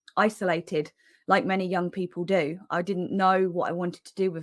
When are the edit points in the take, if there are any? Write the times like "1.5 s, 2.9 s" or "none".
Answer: none